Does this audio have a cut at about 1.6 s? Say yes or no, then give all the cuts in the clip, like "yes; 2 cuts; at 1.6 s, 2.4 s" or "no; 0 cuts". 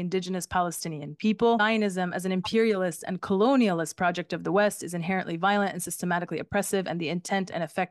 yes; 1 cut; at 1.6 s